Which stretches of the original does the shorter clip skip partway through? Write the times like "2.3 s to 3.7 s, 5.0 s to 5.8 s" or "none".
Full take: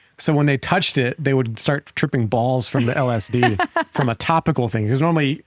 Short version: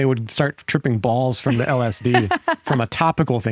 none